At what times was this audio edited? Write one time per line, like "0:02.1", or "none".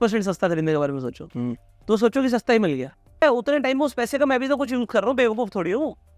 0:03.2